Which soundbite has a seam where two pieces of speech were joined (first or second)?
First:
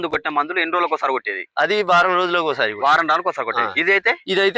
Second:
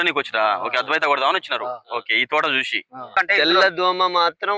second